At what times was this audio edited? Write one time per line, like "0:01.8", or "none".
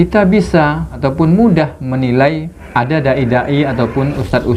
0:00.9
0:02.5